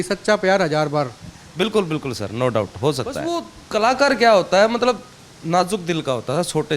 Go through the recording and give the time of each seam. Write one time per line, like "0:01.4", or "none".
0:03.5